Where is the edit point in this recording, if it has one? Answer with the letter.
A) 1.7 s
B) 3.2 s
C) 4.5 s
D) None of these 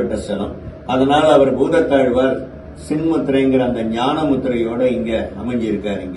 D